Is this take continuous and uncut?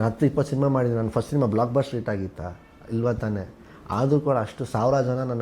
yes; 0 cuts

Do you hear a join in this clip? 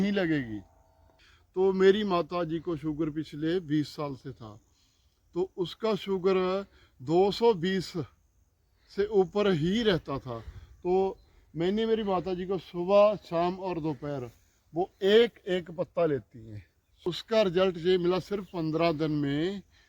yes; 2 cuts; at 1.2 s, 16.9 s

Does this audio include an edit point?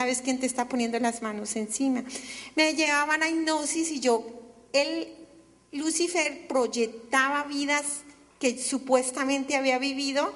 no; 0 cuts

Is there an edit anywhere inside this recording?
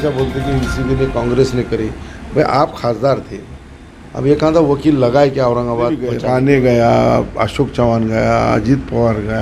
yes; 1 cut; at 6.1 s

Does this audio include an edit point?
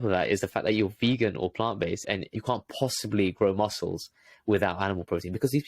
yes; 1 cut; at 2.2 s

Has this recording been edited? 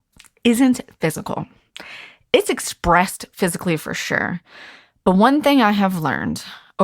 no; 0 cuts

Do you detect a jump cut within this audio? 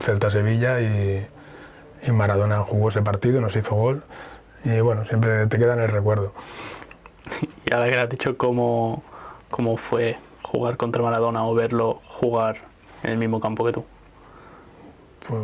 no; 0 cuts

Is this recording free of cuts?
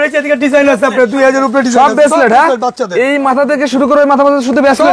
yes; 0 cuts

